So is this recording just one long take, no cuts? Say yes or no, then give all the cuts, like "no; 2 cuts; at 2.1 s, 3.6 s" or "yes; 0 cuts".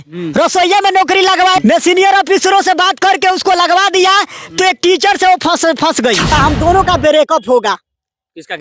no; 2 cuts; at 1.6 s, 6.3 s